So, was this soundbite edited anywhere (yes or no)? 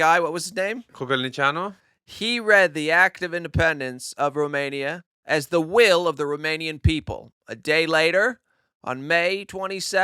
yes